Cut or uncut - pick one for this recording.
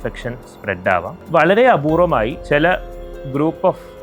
cut